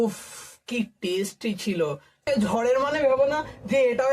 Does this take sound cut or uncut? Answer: cut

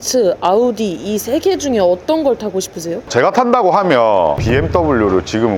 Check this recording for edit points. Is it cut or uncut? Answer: cut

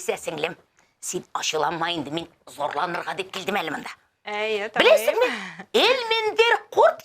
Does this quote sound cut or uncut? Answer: uncut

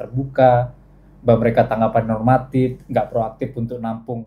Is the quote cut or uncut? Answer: uncut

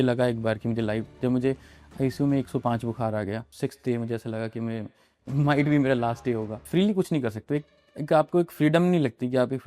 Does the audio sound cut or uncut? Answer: cut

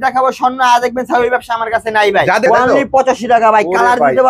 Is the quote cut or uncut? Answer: cut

